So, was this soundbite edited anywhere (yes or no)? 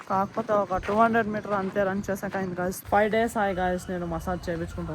yes